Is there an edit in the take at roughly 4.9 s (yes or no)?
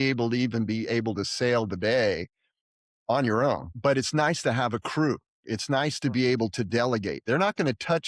no